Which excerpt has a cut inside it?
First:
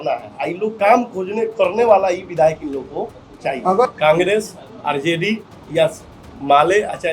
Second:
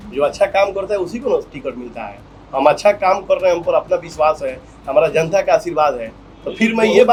first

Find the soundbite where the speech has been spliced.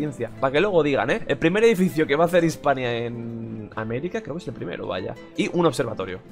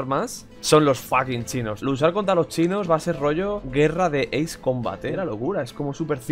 second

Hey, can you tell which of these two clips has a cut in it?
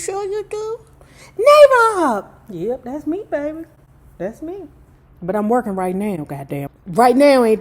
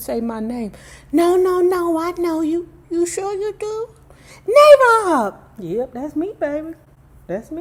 first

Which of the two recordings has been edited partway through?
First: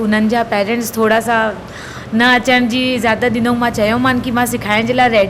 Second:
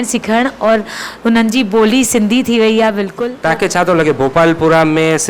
second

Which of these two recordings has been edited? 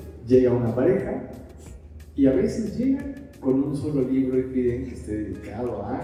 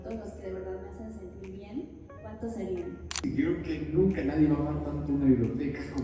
second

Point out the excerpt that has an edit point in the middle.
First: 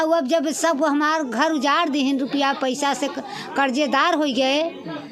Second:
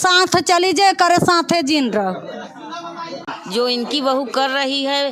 second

